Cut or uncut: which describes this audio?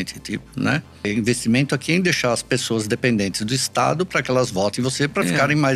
cut